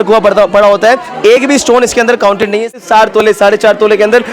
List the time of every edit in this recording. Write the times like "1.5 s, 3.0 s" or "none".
2.8 s